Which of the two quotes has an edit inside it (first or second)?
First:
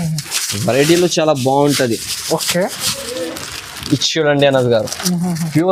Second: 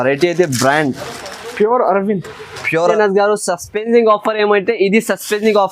second